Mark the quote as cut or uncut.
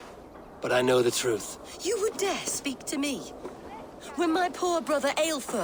uncut